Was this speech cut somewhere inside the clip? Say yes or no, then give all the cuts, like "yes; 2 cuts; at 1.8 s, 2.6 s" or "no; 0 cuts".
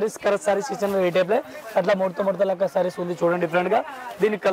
no; 0 cuts